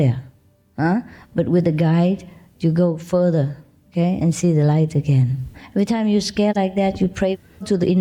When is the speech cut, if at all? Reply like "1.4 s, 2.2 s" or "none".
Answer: 5.6 s